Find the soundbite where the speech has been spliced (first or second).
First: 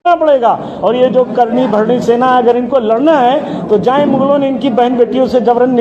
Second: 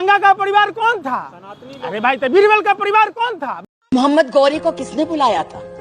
second